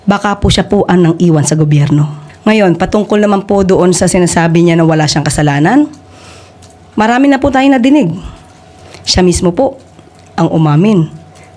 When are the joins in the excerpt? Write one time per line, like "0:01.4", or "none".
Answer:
0:02.2